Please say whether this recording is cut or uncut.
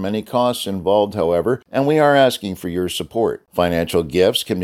cut